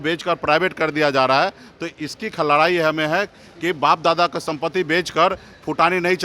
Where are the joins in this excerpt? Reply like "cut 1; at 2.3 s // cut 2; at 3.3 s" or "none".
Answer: none

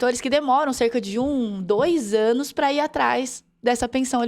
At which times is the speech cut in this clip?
none

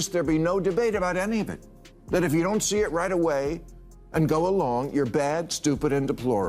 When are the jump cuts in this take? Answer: cut 1; at 1.6 s

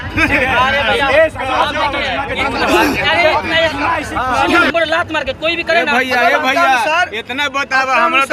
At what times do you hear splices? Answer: none

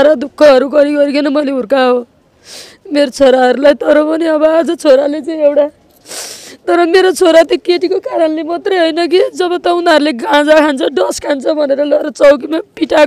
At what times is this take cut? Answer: none

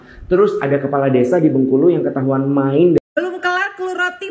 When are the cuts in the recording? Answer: cut 1; at 3.0 s

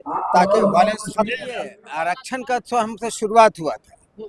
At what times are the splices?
cut 1; at 1.8 s

